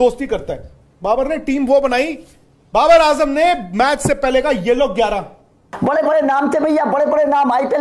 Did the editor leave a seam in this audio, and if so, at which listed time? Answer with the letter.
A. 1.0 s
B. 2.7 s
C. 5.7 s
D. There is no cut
C